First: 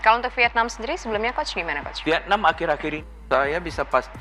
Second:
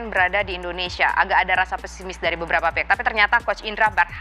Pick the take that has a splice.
first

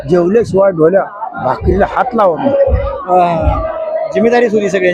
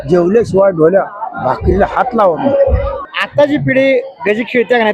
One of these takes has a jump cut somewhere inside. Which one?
second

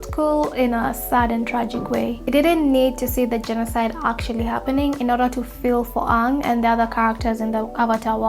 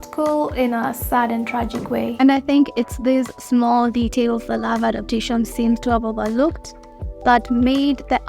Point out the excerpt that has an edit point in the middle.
second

